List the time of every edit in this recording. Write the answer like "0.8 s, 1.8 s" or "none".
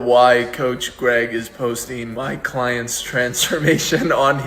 2.1 s